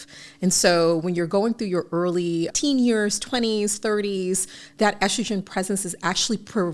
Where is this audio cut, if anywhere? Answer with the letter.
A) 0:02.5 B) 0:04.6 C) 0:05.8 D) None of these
A